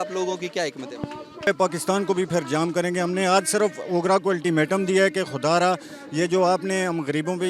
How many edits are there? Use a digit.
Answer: 1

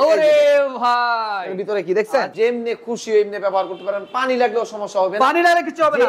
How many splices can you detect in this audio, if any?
1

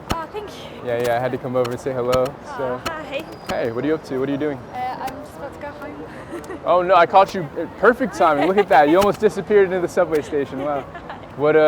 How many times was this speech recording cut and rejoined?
0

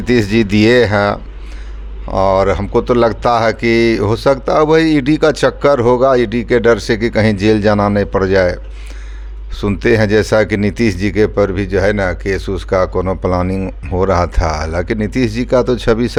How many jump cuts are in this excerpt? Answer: 0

